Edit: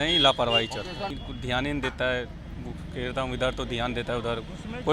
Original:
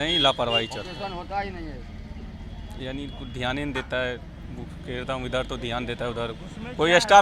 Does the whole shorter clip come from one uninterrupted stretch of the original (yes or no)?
no